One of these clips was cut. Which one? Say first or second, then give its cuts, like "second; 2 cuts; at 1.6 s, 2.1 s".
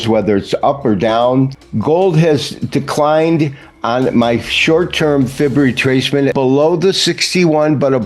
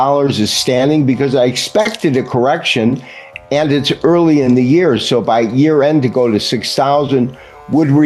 first; 2 cuts; at 1.6 s, 6.3 s